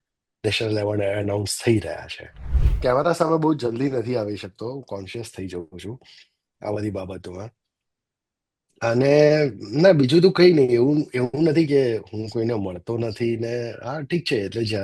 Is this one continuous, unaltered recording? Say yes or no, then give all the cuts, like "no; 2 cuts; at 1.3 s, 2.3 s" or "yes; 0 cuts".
no; 1 cut; at 2.6 s